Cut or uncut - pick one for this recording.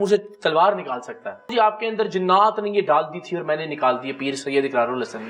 cut